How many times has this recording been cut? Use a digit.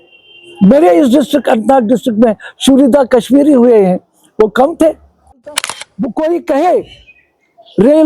1